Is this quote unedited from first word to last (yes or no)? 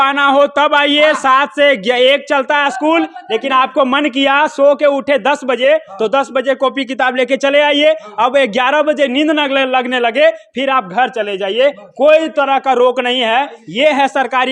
yes